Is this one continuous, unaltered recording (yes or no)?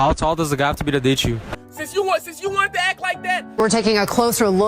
no